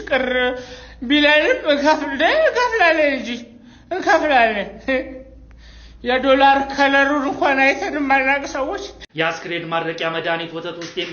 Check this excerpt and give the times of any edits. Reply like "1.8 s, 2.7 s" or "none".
9.0 s